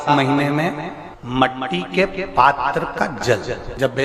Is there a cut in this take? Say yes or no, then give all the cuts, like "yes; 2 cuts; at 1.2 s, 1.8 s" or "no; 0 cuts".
no; 0 cuts